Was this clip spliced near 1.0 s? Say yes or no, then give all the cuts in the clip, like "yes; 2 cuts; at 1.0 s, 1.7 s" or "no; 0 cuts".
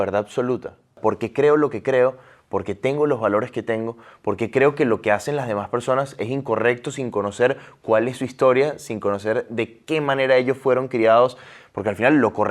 yes; 1 cut; at 1.0 s